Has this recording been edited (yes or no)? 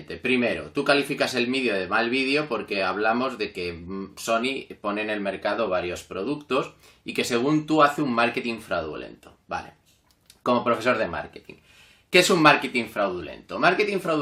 yes